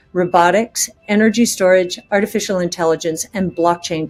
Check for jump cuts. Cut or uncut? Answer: uncut